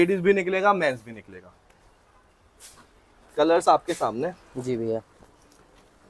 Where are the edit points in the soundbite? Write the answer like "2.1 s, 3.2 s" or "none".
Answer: none